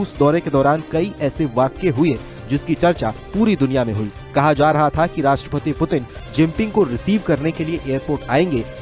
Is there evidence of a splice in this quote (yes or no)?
no